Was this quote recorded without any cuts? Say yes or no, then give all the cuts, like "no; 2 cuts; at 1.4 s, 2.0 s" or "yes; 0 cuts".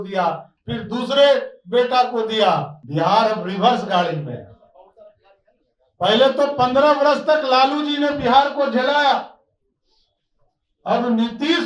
no; 1 cut; at 2.8 s